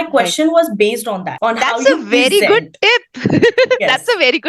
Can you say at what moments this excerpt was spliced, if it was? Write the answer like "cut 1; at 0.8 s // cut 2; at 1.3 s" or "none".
cut 1; at 1.3 s